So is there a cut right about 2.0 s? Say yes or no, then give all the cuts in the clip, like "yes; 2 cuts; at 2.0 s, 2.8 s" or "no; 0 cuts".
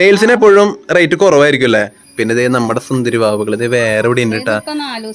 yes; 1 cut; at 2.0 s